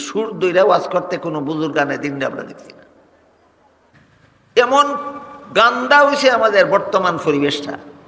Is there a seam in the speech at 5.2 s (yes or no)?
no